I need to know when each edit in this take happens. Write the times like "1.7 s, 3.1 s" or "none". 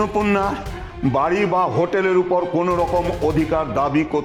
none